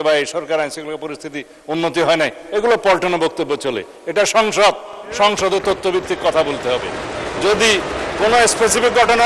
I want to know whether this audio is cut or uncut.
uncut